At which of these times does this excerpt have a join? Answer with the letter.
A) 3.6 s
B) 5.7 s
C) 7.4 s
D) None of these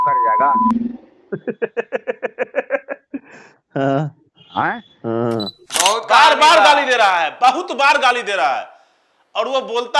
B